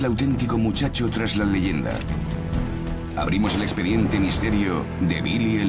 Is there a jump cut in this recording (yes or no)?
no